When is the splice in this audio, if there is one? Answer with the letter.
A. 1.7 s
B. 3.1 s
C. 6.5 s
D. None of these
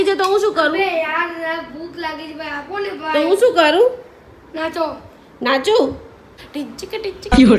C